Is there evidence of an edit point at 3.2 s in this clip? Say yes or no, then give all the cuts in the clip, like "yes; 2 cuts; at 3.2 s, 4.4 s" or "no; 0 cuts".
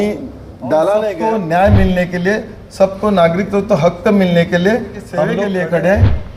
no; 2 cuts; at 1.1 s, 5.2 s